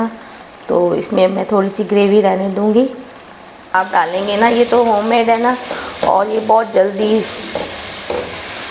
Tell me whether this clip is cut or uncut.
cut